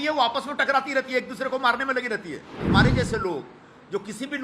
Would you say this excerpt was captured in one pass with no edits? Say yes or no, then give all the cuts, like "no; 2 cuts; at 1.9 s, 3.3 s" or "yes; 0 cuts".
no; 1 cut; at 2.5 s